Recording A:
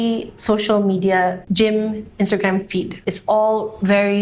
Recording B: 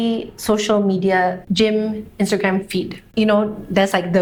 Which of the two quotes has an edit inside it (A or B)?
A